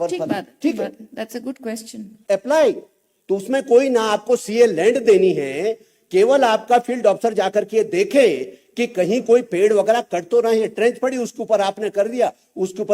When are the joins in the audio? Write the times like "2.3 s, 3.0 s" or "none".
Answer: 2.1 s